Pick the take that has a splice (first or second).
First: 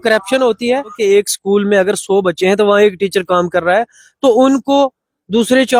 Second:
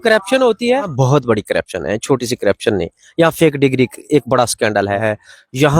second